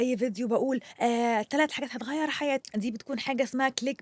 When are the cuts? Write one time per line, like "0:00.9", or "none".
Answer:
0:02.6